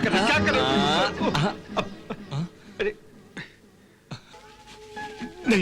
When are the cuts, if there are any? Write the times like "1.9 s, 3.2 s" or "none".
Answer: 4.5 s